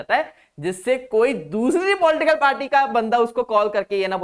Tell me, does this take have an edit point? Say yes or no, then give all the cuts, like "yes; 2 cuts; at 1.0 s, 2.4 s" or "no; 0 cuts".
no; 0 cuts